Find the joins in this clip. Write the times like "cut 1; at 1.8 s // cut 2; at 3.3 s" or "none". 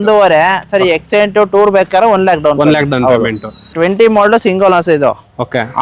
cut 1; at 3.7 s

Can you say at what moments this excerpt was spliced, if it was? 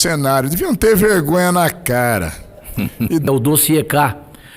cut 1; at 3.3 s

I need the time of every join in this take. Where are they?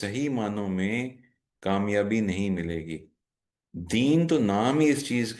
none

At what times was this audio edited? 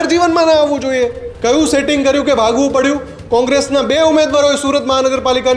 cut 1; at 1.3 s

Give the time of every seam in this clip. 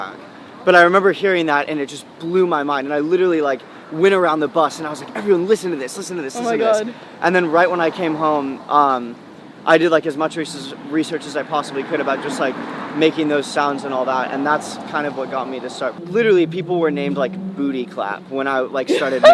cut 1; at 16.0 s

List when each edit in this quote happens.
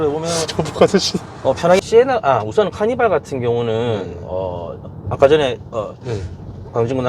cut 1; at 1.8 s

